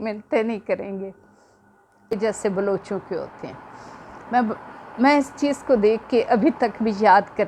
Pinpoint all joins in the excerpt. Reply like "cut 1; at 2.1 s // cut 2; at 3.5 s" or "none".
cut 1; at 2.2 s